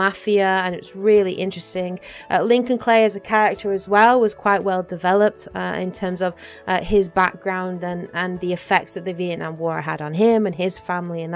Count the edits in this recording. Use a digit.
1